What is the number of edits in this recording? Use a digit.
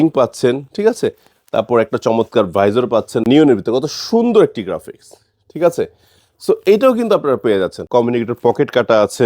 2